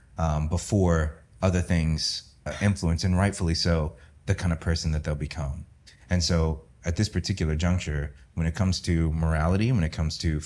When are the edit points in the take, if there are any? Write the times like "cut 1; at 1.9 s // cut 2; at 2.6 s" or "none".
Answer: cut 1; at 2.4 s